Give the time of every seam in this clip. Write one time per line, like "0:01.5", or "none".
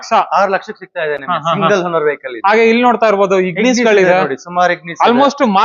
none